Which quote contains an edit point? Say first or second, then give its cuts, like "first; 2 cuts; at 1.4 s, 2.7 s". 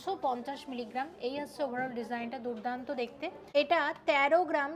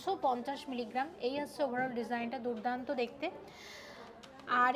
first; 1 cut; at 3.4 s